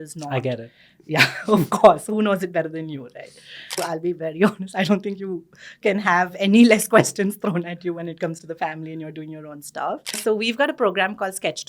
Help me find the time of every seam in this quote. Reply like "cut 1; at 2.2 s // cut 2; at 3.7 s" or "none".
cut 1; at 3.7 s // cut 2; at 10.2 s